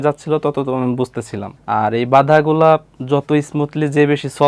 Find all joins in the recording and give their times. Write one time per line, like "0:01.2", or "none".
0:01.4

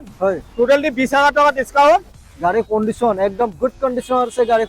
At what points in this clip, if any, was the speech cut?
0:02.2

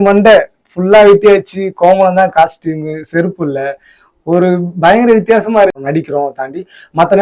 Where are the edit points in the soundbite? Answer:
0:05.8

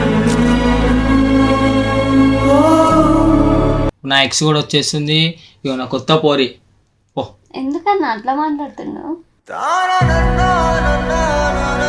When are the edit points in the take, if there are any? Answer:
0:04.0

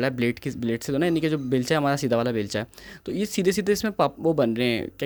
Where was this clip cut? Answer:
none

